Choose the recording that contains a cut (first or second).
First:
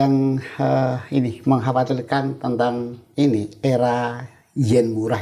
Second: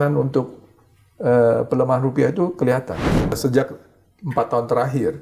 second